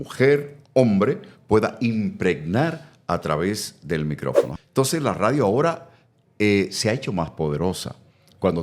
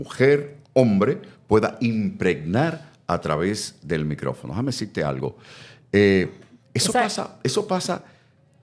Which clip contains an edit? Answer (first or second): first